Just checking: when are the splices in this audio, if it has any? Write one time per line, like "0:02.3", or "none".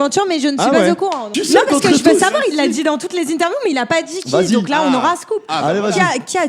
0:01.3

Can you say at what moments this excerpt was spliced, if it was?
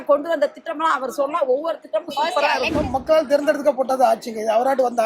0:02.7

